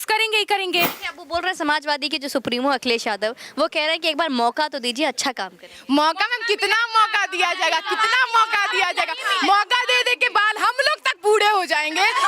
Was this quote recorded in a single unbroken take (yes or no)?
no